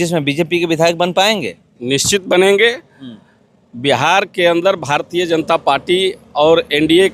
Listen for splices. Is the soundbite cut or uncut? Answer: uncut